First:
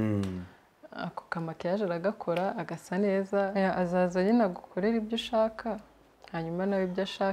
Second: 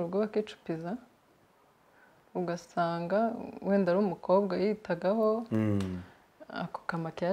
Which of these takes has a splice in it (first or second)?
first